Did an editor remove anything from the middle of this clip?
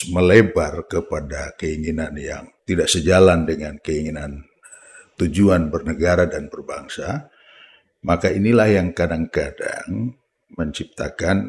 yes; 1 cut; at 2.5 s

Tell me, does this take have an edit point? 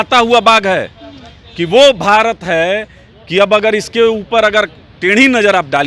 no; 0 cuts

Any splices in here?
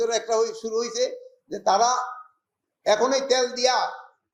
no; 0 cuts

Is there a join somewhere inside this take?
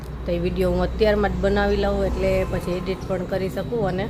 no; 0 cuts

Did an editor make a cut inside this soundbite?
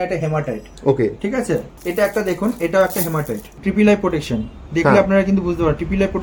yes; 2 cuts; at 1.7 s, 3.4 s

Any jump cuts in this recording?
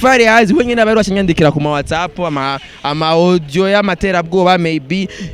no; 0 cuts

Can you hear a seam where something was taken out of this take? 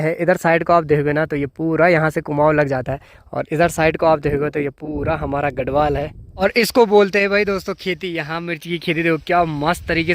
yes; 1 cut; at 6.2 s

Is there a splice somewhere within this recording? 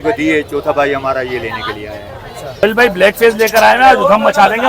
yes; 1 cut; at 2.6 s

